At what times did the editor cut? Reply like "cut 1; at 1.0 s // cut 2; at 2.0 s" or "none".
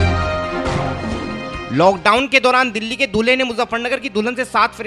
cut 1; at 1.6 s